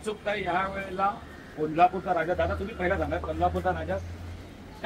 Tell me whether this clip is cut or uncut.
uncut